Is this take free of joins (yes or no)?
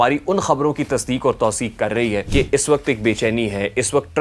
no